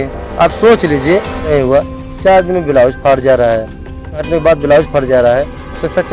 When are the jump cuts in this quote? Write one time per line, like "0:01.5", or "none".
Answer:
0:01.5
0:04.2